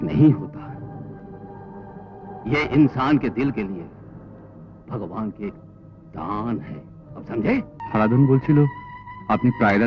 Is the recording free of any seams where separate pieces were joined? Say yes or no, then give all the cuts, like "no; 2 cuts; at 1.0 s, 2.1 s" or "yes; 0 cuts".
no; 1 cut; at 7.8 s